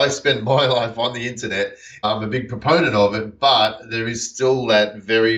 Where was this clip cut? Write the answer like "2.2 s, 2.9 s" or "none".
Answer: 2.0 s